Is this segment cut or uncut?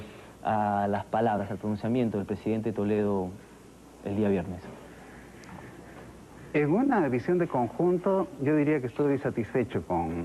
cut